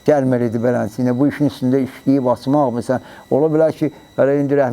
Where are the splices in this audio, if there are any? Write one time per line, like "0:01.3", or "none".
none